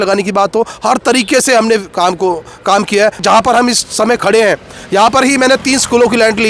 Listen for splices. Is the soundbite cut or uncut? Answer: cut